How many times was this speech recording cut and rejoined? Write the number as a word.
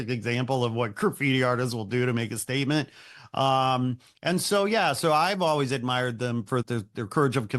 one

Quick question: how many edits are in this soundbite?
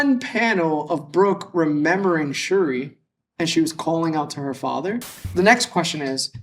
one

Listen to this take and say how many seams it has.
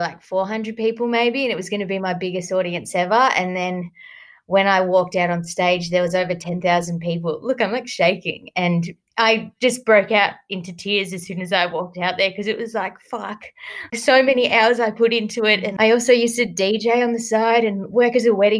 zero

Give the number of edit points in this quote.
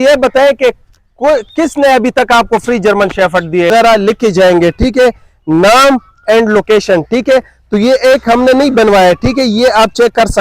one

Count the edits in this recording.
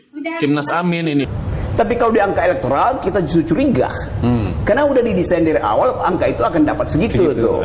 one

